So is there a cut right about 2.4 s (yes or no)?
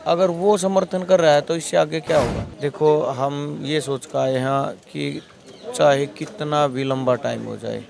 yes